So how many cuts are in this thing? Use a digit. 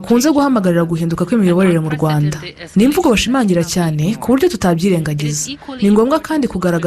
1